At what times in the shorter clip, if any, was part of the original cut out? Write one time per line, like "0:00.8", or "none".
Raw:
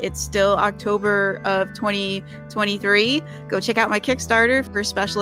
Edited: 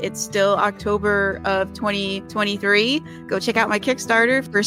0:02.2